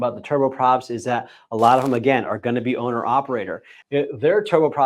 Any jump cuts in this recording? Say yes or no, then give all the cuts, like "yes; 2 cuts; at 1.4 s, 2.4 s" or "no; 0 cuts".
yes; 1 cut; at 3.7 s